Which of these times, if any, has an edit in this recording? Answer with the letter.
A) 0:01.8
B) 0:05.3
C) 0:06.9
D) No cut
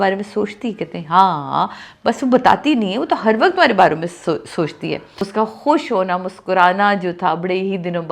B